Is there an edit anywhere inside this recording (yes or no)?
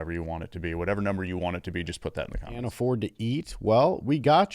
yes